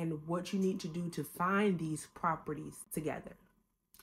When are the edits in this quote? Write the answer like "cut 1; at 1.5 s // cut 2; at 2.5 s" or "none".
cut 1; at 2.8 s